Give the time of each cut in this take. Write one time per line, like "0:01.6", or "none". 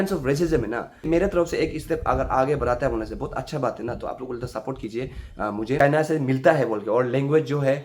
0:01.0
0:05.9